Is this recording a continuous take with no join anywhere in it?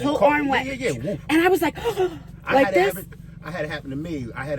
yes; 0 cuts

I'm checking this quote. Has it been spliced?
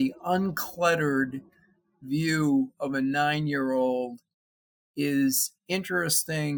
no; 0 cuts

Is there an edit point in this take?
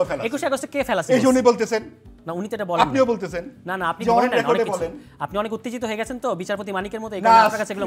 no; 0 cuts

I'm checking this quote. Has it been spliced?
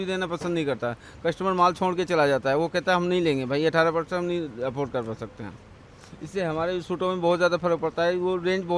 no; 0 cuts

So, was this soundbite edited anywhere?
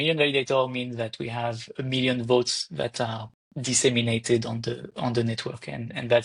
no; 0 cuts

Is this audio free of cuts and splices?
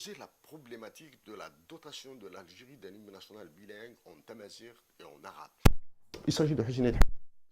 no; 1 cut; at 6.2 s

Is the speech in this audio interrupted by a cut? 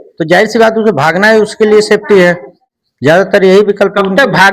yes; 1 cut; at 3.1 s

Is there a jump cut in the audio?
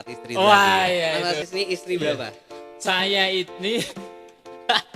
yes; 1 cut; at 1.3 s

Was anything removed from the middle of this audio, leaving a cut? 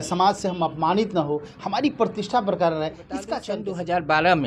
yes; 1 cut; at 3.3 s

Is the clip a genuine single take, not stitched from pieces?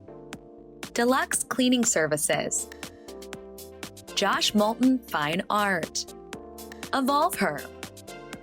no; 3 cuts; at 2.5 s, 4.1 s, 7.6 s

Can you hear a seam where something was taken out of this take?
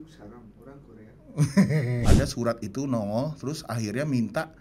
yes; 1 cut; at 2.0 s

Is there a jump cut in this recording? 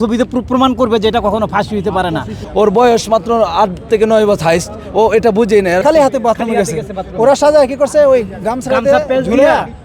yes; 2 cuts; at 2.4 s, 5.8 s

